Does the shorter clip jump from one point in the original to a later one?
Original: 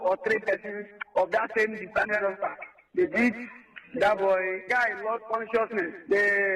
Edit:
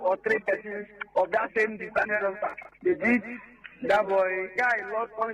yes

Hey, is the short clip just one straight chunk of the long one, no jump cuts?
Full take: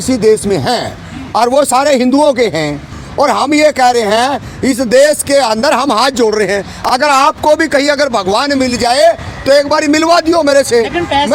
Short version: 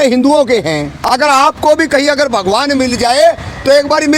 no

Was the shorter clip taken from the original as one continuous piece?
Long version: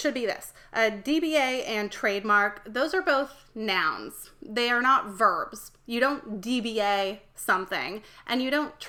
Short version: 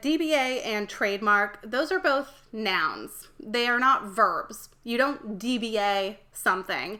yes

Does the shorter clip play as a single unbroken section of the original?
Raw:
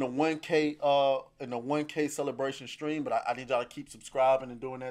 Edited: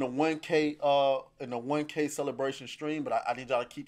yes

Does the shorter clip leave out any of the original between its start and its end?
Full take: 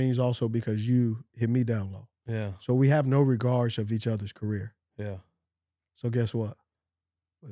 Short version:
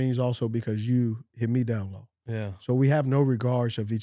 no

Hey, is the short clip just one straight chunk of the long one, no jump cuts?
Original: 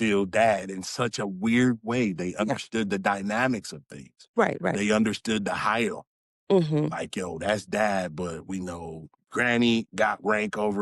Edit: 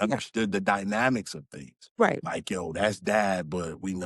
no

